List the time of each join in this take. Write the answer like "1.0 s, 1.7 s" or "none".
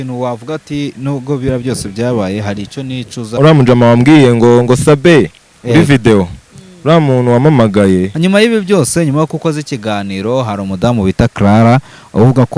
3.4 s, 8.1 s

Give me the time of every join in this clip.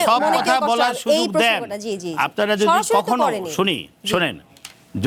none

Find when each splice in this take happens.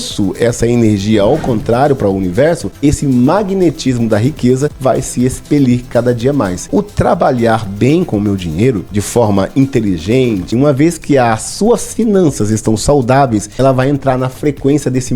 2.7 s, 4.8 s, 6.7 s, 8.9 s, 10.5 s, 13.5 s

